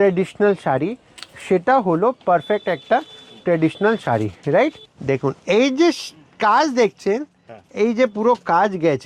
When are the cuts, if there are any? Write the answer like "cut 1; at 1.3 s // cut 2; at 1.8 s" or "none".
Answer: cut 1; at 4.9 s